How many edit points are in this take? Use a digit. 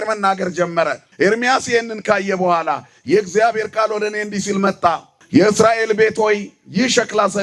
2